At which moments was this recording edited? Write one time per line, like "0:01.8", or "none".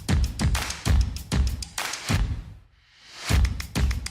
0:02.0